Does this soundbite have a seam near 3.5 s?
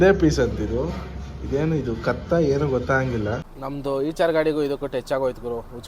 yes; 1 cut; at 3.5 s

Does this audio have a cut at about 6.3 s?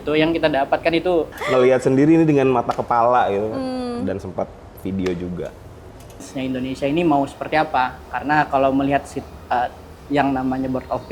yes; 2 cuts; at 1.4 s, 6.3 s

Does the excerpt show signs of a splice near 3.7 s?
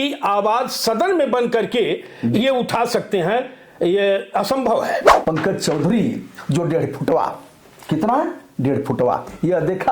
no; 1 cut; at 5.1 s

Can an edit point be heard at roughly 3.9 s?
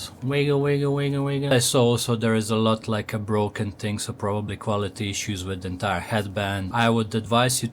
no; 2 cuts; at 1.5 s, 6.7 s

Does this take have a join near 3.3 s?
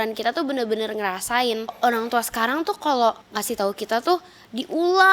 yes; 2 cuts; at 1.8 s, 3.3 s

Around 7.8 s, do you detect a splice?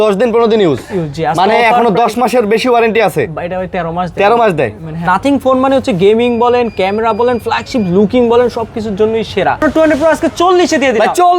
no; 2 cuts; at 5.1 s, 9.6 s

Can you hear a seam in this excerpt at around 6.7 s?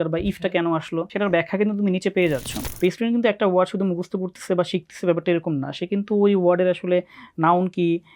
no; 2 cuts; at 1.1 s, 2.6 s

